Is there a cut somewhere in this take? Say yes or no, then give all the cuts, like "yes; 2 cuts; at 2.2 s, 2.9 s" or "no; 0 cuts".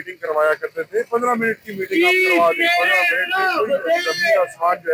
no; 0 cuts